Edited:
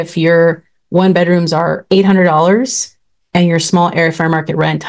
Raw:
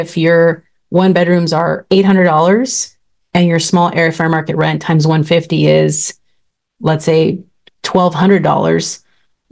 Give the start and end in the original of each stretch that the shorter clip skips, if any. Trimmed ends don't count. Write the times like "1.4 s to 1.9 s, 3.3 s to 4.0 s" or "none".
none